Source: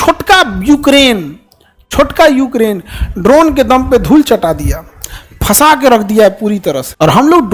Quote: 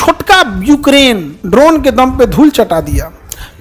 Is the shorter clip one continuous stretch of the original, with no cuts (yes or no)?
no